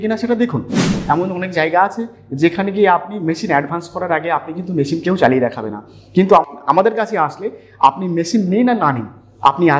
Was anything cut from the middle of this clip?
yes; 2 cuts; at 0.9 s, 6.5 s

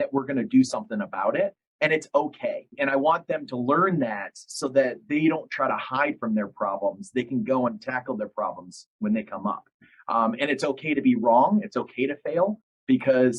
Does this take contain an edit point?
yes; 1 cut; at 2.7 s

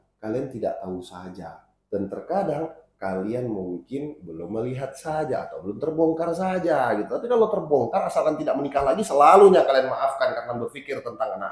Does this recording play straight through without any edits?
yes; 0 cuts

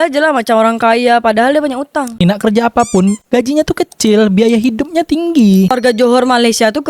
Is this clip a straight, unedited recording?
no; 2 cuts; at 2.2 s, 5.7 s

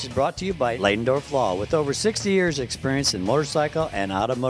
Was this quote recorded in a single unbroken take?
yes; 0 cuts

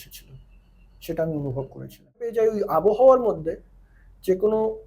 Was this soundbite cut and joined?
yes; 1 cut; at 2.3 s

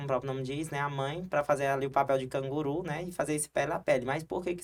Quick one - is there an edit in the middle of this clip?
no; 0 cuts

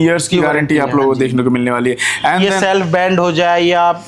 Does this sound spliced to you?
no; 0 cuts

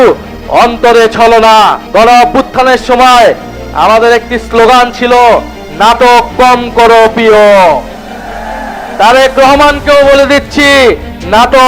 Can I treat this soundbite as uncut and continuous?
no; 1 cut; at 1.8 s

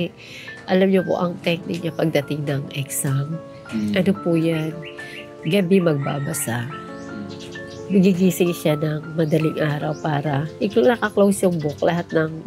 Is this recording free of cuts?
yes; 0 cuts

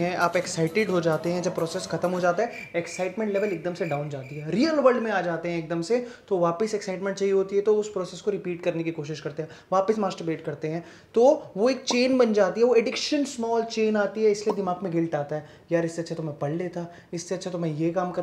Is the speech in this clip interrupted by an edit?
no; 0 cuts

